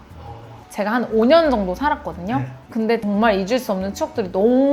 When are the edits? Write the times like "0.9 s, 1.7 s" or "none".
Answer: 3.0 s

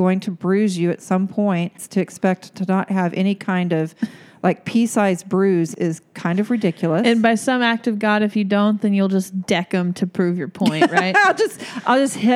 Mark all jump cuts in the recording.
1.8 s, 5.7 s

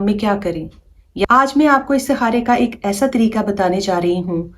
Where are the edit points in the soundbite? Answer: 1.2 s

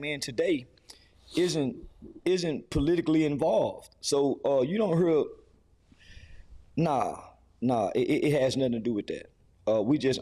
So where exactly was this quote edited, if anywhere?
none

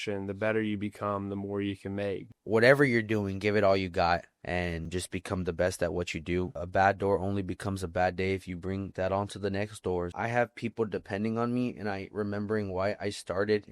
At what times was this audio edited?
2.3 s, 6.6 s, 10.1 s

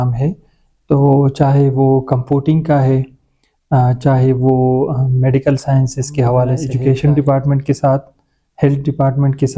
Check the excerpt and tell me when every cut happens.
6.7 s

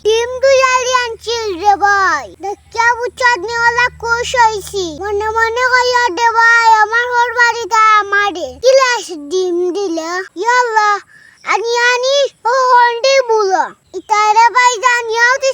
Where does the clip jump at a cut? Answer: 13.8 s

